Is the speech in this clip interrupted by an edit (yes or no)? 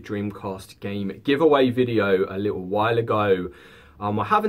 no